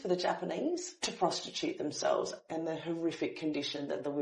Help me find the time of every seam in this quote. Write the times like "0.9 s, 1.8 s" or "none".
0.9 s, 2.3 s

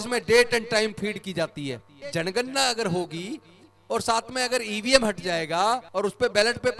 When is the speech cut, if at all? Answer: 2.0 s, 5.9 s

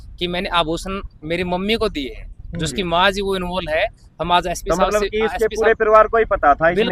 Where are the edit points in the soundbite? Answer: none

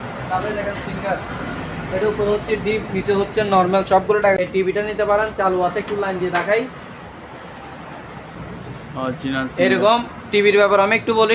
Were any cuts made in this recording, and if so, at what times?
4.5 s, 8.4 s

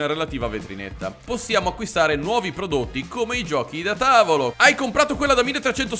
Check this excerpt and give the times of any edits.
1.1 s, 4.5 s

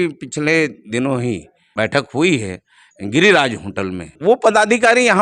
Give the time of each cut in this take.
1.6 s, 4.1 s

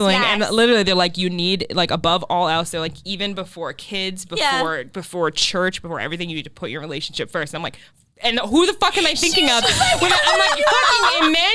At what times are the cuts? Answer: none

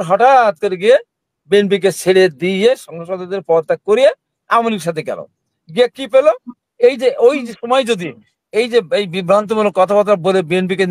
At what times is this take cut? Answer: 6.5 s

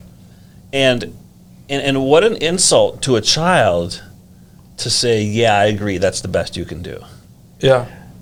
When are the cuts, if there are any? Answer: none

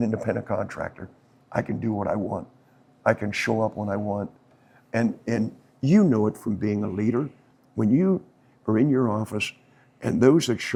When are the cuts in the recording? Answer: none

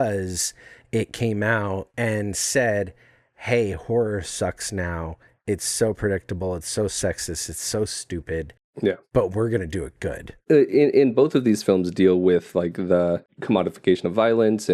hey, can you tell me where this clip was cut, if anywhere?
1.9 s, 9.0 s, 10.3 s, 13.3 s

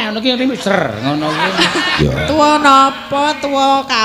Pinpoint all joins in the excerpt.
2.0 s

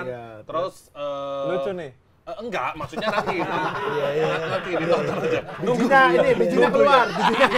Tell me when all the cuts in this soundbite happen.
none

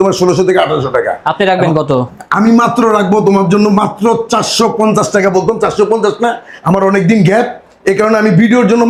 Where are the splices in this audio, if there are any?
none

